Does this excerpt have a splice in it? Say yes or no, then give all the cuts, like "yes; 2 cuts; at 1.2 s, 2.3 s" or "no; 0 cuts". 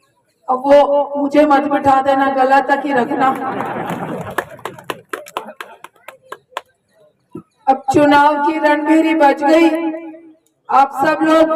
no; 0 cuts